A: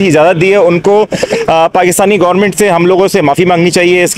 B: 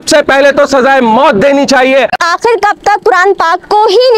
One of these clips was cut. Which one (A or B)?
B